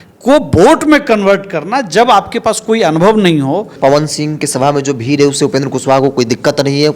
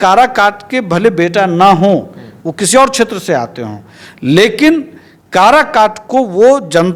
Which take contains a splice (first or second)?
first